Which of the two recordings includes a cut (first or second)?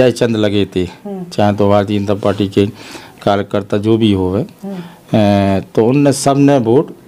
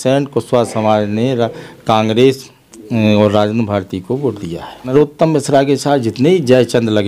second